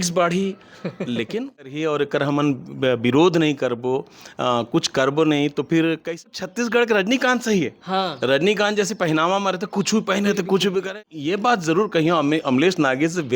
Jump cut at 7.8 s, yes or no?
no